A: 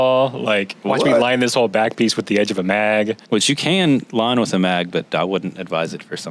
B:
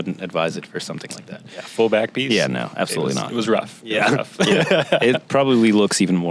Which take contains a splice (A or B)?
A